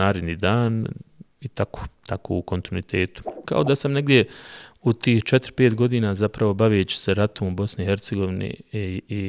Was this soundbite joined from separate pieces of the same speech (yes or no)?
yes